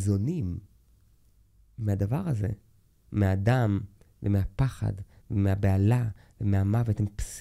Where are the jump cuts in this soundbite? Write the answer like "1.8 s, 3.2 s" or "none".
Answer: none